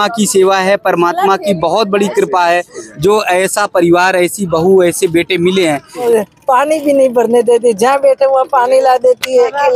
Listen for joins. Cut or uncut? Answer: cut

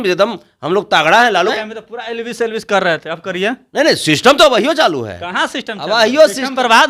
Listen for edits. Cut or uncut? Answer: cut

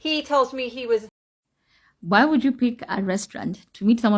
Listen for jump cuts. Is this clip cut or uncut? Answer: cut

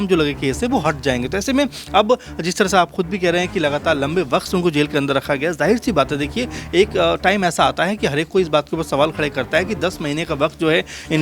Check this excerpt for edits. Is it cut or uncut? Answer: uncut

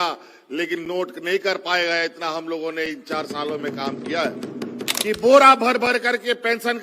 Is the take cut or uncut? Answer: cut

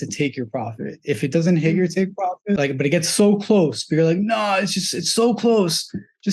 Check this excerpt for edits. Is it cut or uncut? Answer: cut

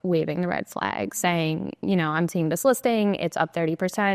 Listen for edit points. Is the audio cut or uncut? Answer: uncut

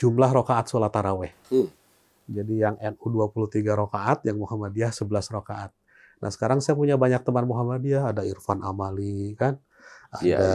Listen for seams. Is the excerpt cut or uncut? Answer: uncut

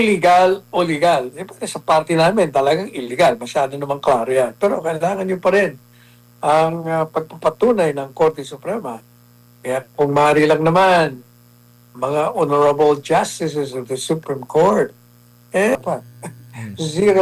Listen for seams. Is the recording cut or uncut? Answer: cut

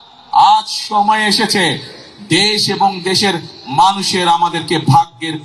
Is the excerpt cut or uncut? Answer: uncut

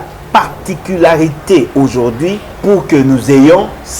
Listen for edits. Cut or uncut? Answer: cut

